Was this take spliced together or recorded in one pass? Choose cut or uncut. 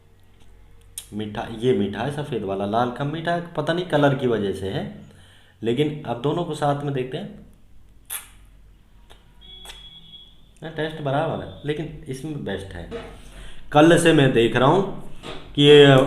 cut